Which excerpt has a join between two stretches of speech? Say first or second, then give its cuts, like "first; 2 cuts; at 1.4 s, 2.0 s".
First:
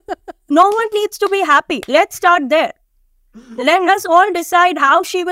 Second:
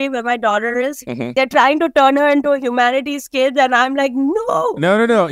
second; 1 cut; at 1.3 s